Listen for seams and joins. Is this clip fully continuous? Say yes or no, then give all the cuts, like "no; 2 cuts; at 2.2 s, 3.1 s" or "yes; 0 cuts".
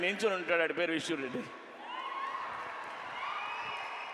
yes; 0 cuts